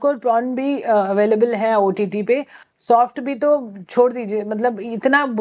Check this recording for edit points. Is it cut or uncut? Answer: uncut